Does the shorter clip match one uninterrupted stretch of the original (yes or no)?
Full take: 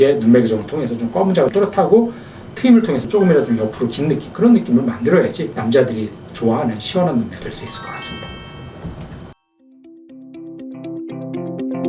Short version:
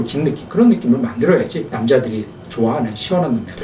yes